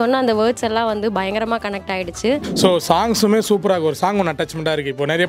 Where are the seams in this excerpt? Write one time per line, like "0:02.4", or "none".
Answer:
0:02.5